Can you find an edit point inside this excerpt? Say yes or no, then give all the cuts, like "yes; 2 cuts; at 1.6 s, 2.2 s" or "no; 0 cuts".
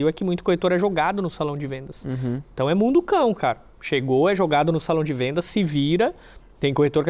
no; 0 cuts